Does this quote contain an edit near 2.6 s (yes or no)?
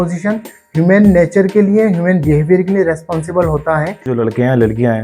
no